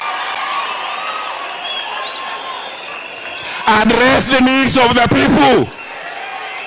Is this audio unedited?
yes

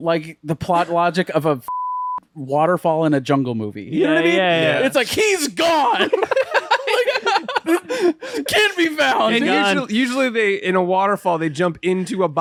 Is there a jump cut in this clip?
no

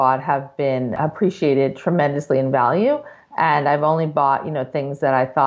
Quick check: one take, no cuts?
yes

